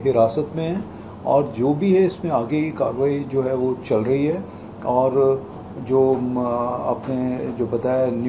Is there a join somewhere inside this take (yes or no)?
no